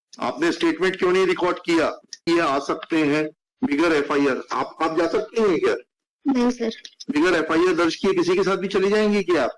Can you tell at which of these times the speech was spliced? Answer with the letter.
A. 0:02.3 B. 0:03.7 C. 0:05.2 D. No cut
A